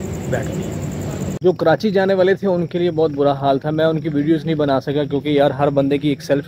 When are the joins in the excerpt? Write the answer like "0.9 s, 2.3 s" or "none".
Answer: 1.3 s